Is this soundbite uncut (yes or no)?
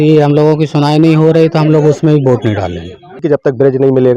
no